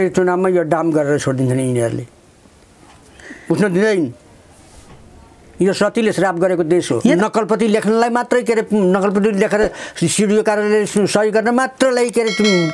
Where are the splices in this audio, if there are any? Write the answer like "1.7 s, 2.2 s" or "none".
7.2 s